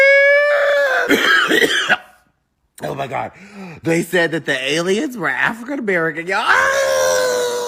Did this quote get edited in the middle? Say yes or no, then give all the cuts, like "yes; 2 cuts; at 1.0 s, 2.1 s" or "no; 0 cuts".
no; 0 cuts